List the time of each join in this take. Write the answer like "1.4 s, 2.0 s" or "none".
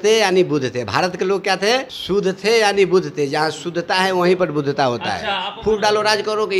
1.9 s, 5.5 s